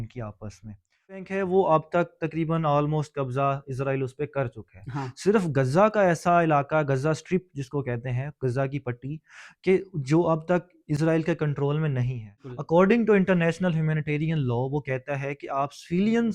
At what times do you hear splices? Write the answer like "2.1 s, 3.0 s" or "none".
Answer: 1.3 s, 12.4 s